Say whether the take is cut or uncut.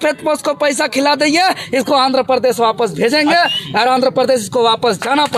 uncut